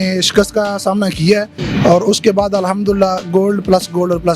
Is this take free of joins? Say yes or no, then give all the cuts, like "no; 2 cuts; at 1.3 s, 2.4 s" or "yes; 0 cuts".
no; 1 cut; at 1.6 s